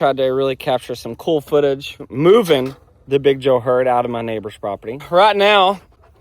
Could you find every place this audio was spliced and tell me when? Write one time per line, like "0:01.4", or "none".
0:02.0
0:05.0